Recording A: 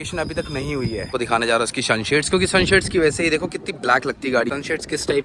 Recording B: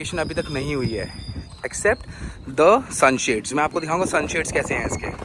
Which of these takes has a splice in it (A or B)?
A